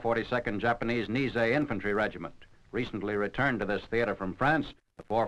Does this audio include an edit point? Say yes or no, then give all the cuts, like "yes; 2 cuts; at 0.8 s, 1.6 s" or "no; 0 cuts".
no; 0 cuts